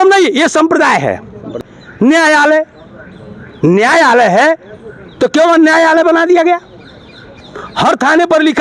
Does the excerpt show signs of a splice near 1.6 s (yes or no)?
yes